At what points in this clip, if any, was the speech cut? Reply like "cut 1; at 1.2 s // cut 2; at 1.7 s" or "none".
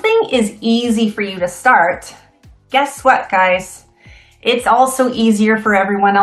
none